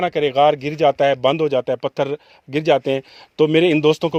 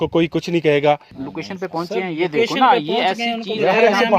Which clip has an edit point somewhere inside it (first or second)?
second